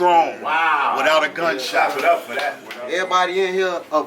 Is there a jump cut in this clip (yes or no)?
yes